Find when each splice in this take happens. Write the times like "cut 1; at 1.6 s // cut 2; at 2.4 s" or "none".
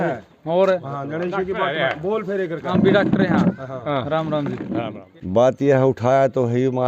cut 1; at 4.9 s